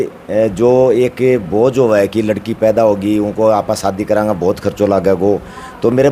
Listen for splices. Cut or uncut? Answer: uncut